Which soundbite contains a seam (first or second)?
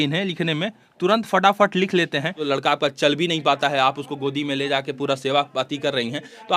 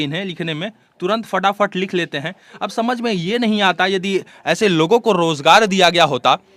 first